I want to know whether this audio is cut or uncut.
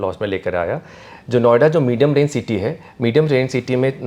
uncut